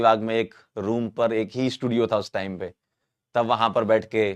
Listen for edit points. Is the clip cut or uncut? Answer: uncut